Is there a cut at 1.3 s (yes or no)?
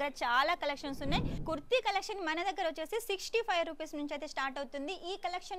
yes